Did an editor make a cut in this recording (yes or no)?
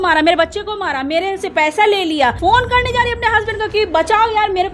yes